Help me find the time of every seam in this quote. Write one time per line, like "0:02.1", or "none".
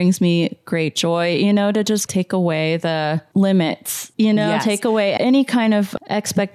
none